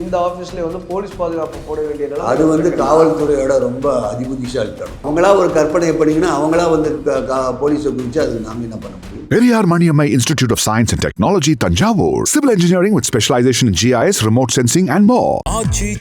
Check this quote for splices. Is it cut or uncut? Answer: cut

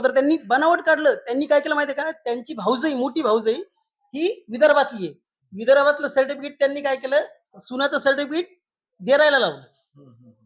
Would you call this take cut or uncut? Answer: uncut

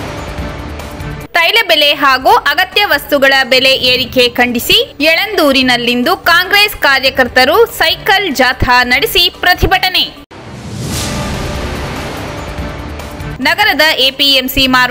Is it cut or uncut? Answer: cut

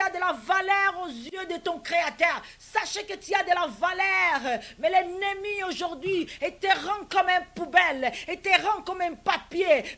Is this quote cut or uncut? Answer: cut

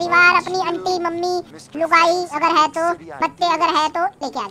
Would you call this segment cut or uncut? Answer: uncut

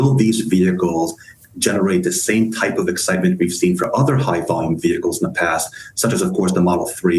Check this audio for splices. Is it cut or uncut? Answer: uncut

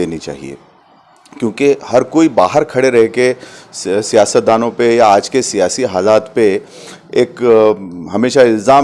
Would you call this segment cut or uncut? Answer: uncut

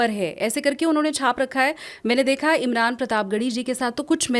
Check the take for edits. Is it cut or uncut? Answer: uncut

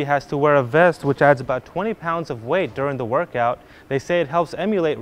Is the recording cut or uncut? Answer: uncut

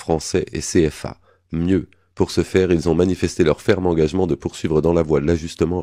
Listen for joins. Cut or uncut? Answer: uncut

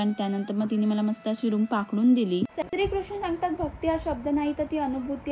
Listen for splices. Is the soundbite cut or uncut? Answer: cut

